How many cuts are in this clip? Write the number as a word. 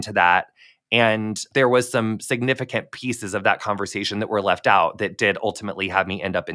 one